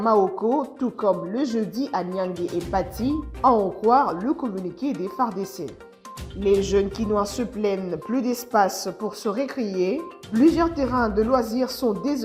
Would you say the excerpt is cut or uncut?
uncut